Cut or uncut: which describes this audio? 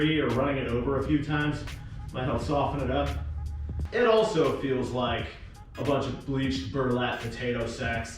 cut